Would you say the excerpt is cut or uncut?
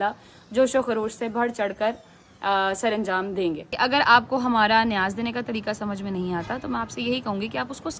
cut